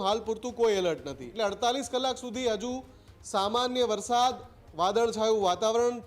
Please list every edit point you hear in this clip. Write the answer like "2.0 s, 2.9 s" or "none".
1.3 s